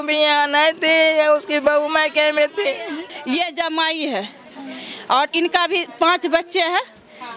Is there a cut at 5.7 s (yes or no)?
no